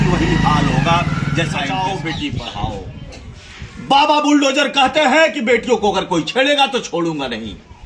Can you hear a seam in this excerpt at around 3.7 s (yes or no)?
no